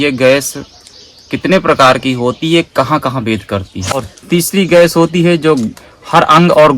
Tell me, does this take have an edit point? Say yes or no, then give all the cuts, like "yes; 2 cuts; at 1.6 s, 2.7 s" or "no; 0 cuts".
yes; 1 cut; at 4.0 s